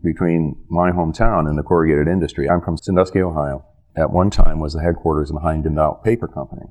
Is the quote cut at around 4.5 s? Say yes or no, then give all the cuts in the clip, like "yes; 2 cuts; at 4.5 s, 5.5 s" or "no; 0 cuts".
no; 1 cut; at 2.5 s